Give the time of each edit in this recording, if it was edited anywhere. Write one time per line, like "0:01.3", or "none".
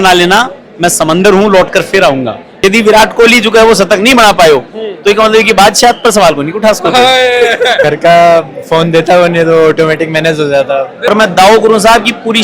0:02.5
0:07.8
0:11.0